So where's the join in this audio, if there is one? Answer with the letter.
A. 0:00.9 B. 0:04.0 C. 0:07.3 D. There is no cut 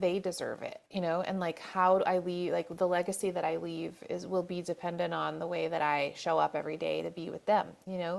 D